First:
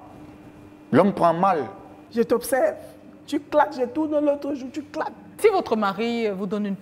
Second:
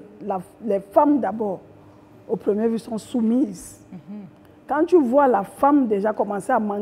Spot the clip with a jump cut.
first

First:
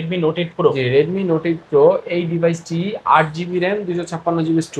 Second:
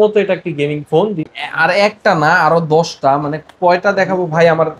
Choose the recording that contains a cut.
second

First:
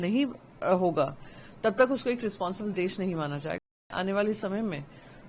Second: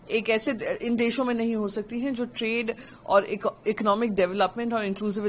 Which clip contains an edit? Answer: first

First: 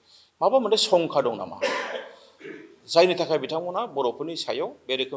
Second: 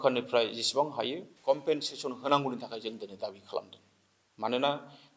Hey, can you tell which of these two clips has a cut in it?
second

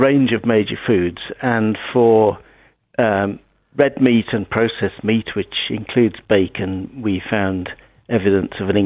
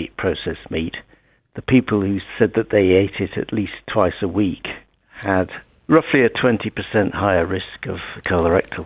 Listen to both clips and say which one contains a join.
second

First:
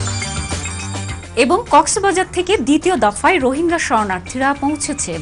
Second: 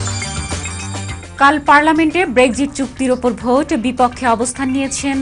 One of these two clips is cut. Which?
second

